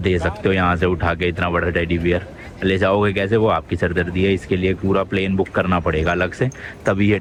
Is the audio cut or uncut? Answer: uncut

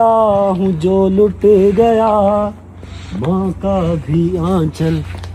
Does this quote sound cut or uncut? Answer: uncut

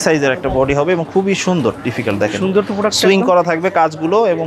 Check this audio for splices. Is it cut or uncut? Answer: uncut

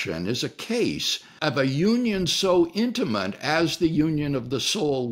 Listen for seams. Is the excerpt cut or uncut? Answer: cut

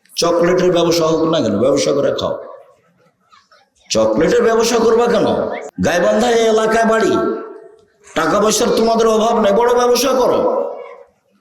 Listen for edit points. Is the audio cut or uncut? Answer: cut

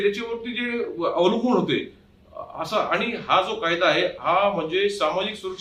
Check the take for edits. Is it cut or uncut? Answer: uncut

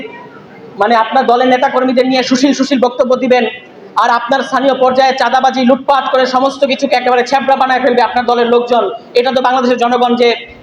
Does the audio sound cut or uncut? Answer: uncut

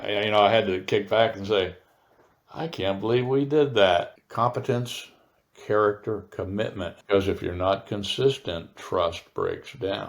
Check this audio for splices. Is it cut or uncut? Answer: cut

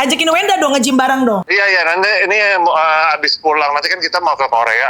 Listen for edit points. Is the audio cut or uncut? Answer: cut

